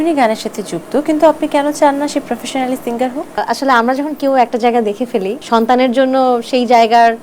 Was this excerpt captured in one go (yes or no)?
no